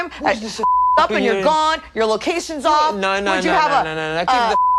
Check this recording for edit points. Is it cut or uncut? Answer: uncut